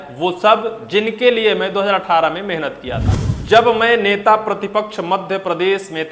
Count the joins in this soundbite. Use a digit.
1